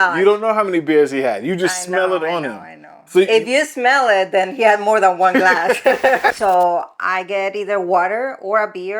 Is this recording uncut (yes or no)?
no